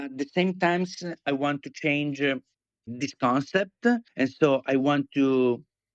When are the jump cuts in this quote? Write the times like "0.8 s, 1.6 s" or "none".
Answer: 4.1 s